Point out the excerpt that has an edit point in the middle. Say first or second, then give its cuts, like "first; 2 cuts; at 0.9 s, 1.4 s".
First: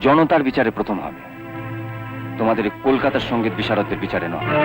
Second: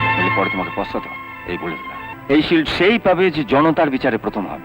second; 1 cut; at 2.1 s